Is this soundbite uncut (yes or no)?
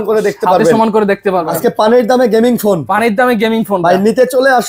no